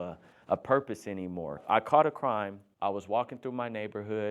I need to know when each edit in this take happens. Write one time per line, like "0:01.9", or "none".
0:01.6
0:02.6